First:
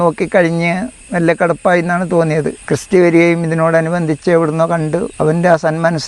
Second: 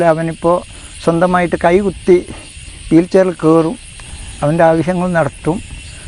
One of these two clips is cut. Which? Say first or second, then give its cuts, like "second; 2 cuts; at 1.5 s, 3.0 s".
first; 2 cuts; at 2.6 s, 5.1 s